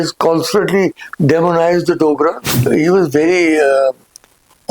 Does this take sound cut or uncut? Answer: cut